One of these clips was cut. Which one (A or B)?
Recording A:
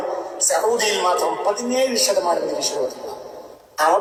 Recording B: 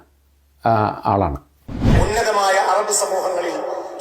B